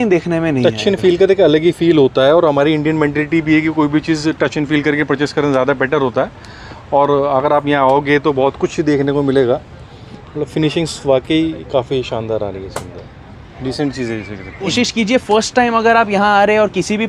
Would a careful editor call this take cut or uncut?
uncut